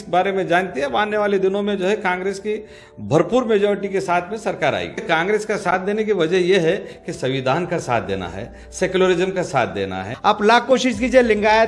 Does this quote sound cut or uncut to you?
cut